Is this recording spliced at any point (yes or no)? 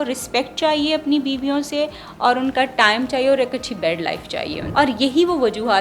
yes